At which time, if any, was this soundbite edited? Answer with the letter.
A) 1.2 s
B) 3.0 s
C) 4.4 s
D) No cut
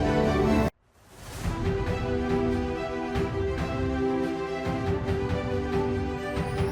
D